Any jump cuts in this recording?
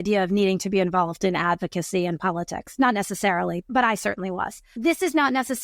yes; 2 cuts; at 3.7 s, 4.7 s

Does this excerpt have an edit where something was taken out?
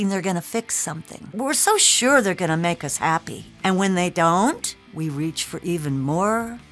yes; 1 cut; at 1.3 s

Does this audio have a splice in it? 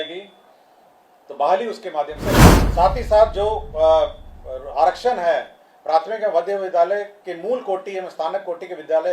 yes; 1 cut; at 2.5 s

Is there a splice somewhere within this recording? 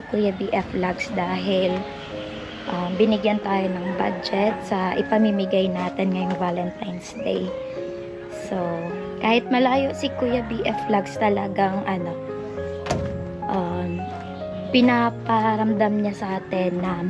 no; 0 cuts

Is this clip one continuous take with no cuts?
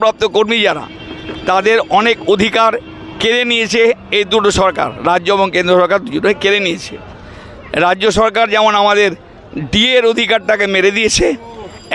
yes; 0 cuts

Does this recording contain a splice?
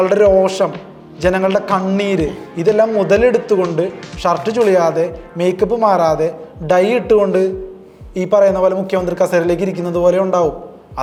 no; 0 cuts

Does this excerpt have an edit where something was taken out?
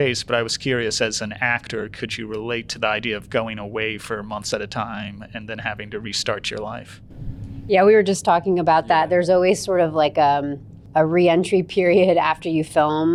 no; 0 cuts

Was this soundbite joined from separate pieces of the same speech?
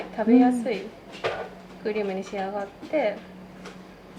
no; 0 cuts

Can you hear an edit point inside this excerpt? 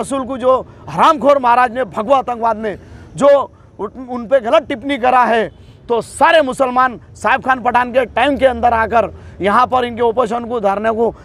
no; 0 cuts

